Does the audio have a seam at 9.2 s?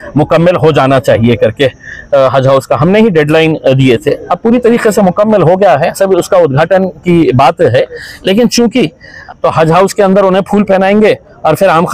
yes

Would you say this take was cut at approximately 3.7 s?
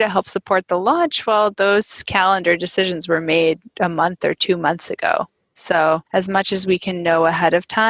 no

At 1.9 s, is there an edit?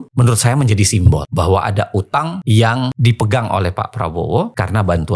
no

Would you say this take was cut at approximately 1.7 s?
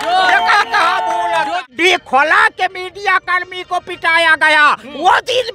yes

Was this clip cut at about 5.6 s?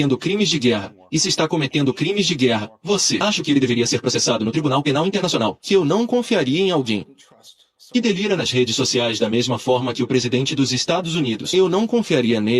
yes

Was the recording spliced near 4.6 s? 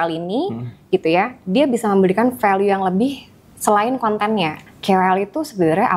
yes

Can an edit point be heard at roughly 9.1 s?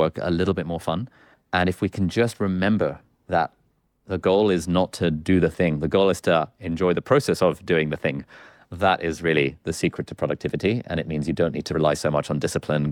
no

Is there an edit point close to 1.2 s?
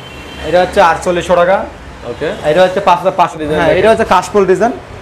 no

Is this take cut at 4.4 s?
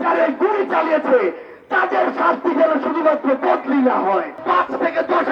yes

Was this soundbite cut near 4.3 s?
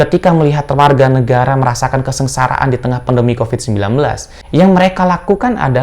yes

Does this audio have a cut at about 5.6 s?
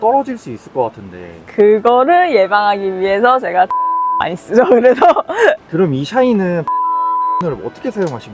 yes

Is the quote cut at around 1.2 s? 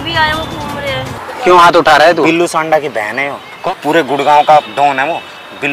yes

